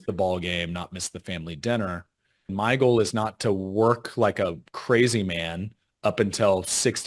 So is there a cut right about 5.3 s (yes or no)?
no